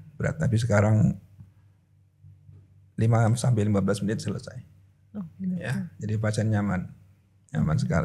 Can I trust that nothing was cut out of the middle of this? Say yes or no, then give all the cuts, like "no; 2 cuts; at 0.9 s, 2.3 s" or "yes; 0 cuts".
yes; 0 cuts